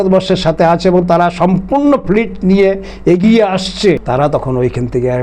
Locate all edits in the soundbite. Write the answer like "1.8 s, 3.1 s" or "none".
4.0 s